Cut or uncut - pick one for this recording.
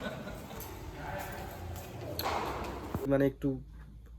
cut